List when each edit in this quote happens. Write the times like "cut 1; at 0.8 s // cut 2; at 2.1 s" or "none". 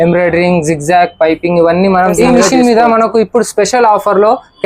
cut 1; at 2.2 s